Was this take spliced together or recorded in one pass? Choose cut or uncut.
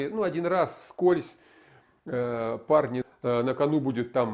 cut